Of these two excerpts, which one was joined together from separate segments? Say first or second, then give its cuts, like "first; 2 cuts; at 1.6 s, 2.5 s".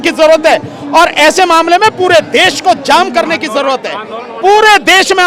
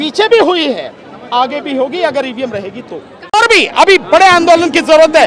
second; 1 cut; at 3.3 s